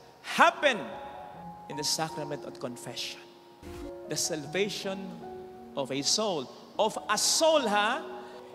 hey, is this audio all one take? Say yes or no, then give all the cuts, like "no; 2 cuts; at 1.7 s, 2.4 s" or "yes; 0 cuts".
no; 1 cut; at 3.5 s